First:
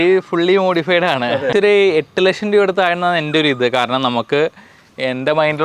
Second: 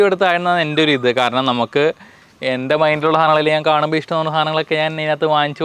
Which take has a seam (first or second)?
first